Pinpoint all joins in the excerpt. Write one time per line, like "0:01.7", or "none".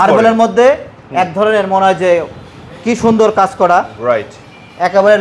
none